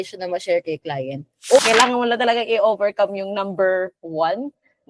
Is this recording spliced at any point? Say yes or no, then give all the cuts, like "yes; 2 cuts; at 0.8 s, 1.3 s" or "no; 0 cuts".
yes; 1 cut; at 1.6 s